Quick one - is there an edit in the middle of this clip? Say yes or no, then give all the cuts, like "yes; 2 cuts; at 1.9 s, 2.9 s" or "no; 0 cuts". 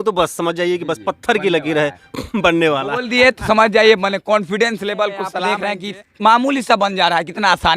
yes; 1 cut; at 5.4 s